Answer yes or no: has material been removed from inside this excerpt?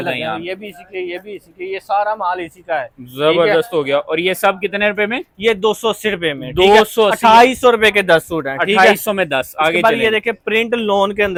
no